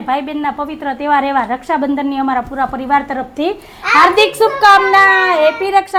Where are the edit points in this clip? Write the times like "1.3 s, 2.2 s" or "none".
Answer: none